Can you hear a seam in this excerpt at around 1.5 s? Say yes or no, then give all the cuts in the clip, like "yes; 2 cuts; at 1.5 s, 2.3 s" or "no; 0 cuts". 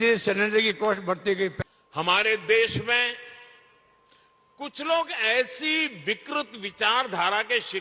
yes; 1 cut; at 1.5 s